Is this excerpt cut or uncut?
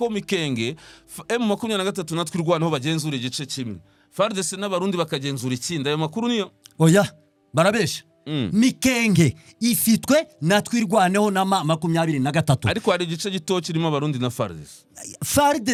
uncut